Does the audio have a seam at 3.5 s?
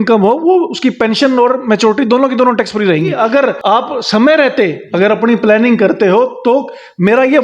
yes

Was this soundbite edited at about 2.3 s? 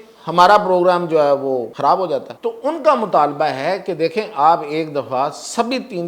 yes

